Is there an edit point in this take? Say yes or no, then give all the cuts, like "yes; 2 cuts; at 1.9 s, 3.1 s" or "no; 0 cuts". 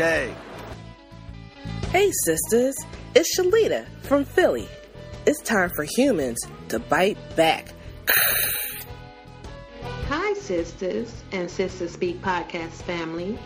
yes; 2 cuts; at 8.5 s, 10.1 s